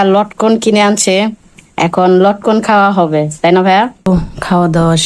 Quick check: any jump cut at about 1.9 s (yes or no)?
no